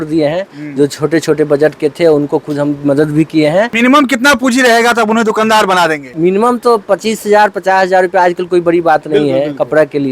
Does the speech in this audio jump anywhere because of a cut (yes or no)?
yes